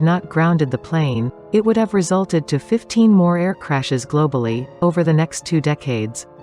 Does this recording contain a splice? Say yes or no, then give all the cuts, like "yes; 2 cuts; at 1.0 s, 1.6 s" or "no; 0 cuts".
no; 0 cuts